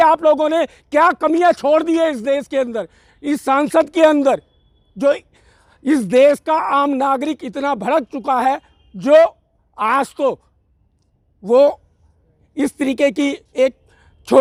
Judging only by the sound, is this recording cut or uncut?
uncut